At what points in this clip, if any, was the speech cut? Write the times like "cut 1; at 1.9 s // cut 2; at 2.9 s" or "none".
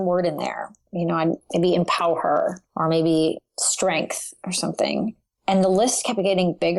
none